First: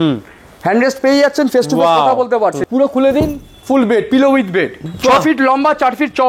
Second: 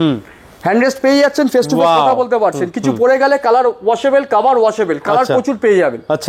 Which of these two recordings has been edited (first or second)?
first